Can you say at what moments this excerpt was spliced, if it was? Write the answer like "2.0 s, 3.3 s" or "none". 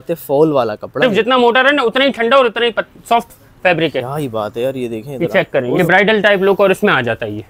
1.0 s, 5.8 s